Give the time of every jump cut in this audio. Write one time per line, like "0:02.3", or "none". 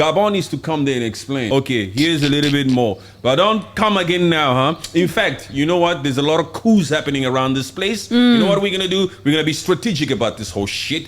0:01.4